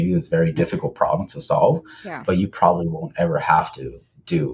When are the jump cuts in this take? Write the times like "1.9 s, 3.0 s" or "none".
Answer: none